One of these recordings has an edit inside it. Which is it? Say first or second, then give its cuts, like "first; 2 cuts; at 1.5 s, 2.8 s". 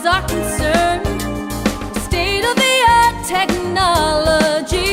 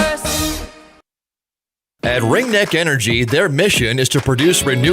second; 2 cuts; at 1.7 s, 3.5 s